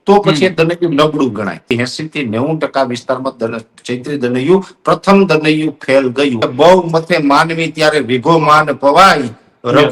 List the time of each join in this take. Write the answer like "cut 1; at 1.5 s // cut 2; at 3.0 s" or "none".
cut 1; at 1.6 s // cut 2; at 6.4 s